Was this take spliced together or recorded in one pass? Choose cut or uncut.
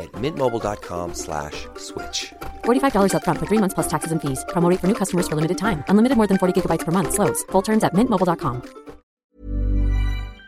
cut